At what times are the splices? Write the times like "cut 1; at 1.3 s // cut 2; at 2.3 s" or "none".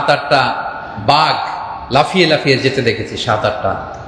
none

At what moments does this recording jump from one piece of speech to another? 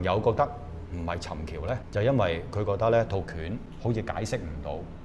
cut 1; at 1.8 s // cut 2; at 3.7 s

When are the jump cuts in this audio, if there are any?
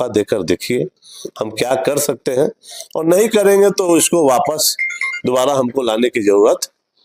none

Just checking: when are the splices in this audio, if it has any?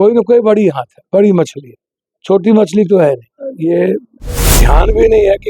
cut 1; at 3.6 s

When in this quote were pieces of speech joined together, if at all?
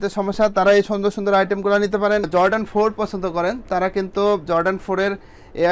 cut 1; at 2.2 s

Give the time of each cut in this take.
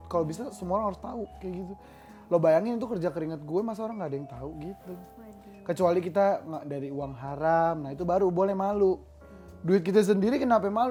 none

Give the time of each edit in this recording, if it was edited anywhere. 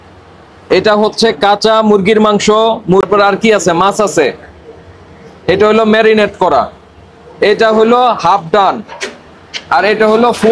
cut 1; at 3.0 s

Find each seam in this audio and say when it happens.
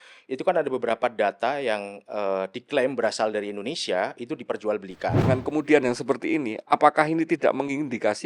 cut 1; at 5.2 s

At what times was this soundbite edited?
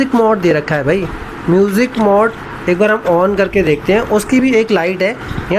none

